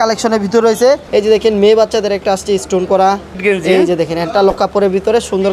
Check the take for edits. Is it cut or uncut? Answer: cut